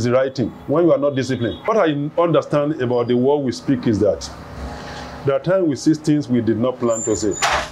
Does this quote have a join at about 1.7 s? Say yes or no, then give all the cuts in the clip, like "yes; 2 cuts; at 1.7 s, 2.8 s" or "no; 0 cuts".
yes; 1 cut; at 1.7 s